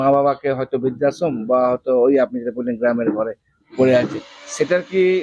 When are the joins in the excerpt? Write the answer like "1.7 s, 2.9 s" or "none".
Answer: none